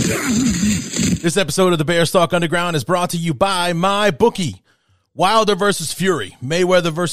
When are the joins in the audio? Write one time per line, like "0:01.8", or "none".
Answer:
0:01.1